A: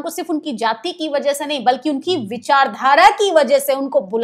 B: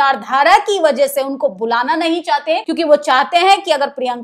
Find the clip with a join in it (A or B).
B